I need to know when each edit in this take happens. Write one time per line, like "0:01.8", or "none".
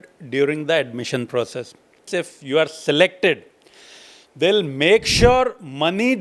0:02.0

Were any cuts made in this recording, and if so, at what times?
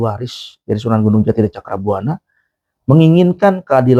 none

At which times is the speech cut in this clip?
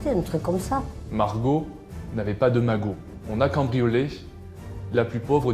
0:01.0
0:03.1

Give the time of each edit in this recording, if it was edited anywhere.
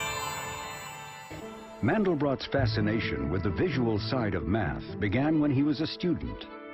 none

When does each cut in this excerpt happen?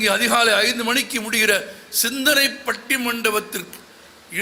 none

